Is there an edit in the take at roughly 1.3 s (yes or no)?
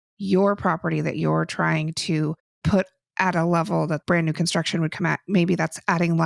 no